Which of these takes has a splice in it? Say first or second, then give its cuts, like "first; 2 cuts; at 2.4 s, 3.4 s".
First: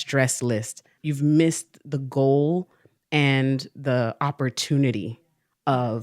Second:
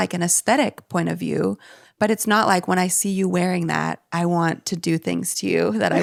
first; 1 cut; at 0.9 s